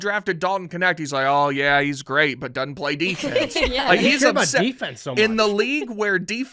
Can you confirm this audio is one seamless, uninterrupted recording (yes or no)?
yes